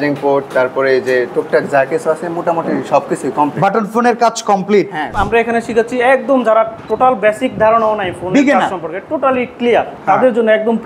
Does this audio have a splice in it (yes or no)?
yes